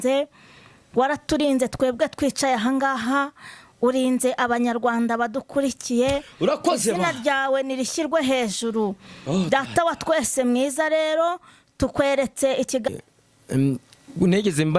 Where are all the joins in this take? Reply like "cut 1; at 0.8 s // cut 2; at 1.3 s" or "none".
cut 1; at 12.9 s